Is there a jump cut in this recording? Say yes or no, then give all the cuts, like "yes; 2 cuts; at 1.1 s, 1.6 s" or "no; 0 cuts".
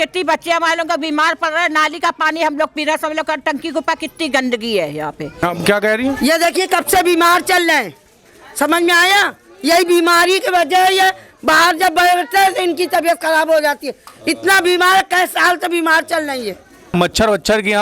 yes; 2 cuts; at 5.3 s, 16.9 s